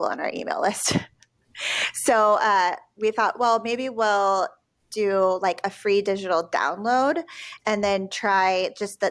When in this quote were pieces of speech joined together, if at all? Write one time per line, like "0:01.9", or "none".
none